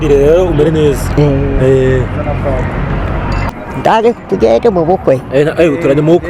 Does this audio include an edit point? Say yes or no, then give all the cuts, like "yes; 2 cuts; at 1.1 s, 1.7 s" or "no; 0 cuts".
yes; 1 cut; at 3.5 s